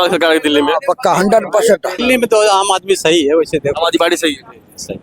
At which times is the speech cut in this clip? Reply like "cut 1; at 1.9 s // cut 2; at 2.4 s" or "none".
cut 1; at 2.0 s